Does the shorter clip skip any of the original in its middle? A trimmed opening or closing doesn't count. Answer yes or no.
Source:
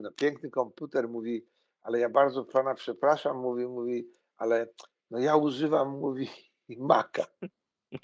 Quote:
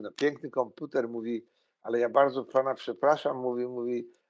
no